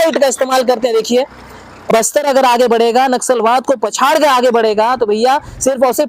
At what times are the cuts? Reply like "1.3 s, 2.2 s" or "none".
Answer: 1.9 s